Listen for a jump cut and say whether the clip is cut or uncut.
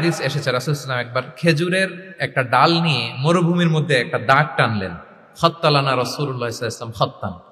uncut